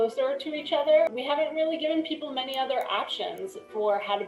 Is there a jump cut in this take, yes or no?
yes